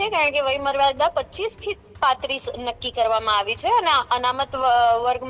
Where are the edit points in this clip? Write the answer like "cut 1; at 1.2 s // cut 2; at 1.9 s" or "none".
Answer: none